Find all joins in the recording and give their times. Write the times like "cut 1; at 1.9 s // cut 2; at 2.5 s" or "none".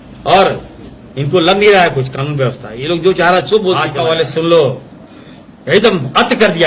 cut 1; at 3.9 s